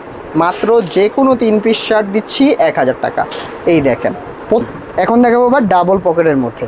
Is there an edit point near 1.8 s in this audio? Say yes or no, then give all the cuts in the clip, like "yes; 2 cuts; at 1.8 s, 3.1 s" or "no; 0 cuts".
no; 1 cut; at 4.7 s